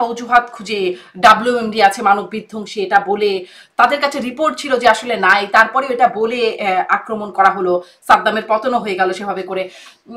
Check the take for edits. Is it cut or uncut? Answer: uncut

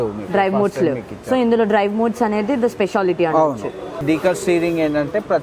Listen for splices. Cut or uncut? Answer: cut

